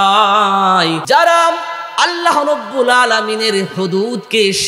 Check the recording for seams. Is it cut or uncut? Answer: cut